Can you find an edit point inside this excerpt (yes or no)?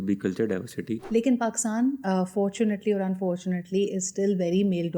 yes